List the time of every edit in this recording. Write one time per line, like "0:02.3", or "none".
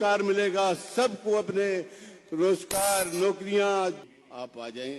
0:04.0